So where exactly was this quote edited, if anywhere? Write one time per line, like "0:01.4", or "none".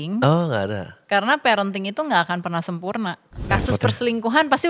0:03.3

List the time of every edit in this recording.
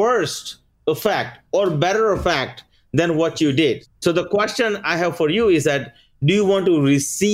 0:03.8

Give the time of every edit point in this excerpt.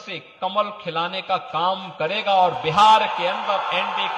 none

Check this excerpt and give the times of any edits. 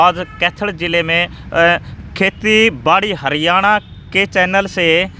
none

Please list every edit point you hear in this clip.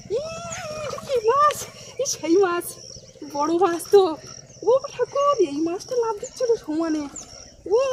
none

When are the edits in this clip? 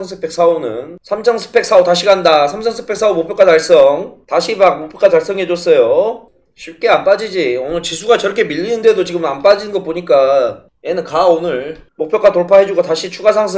none

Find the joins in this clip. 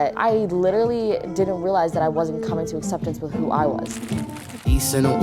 0:03.9

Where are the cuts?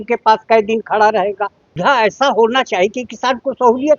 0:01.7

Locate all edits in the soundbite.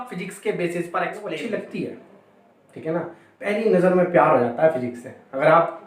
0:01.3

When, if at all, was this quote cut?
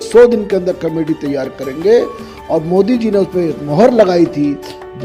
none

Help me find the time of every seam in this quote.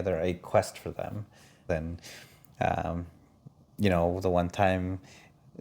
0:01.6

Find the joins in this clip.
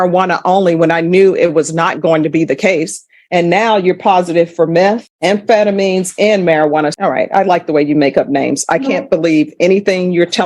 0:06.9

